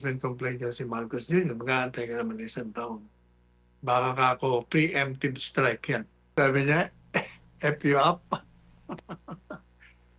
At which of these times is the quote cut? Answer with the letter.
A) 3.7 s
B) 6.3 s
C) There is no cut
B